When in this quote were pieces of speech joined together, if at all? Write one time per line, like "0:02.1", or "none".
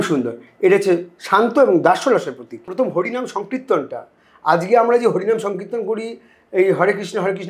0:02.7